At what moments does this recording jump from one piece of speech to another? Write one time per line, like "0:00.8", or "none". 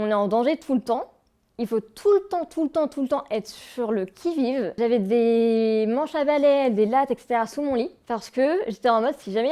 0:04.8
0:08.0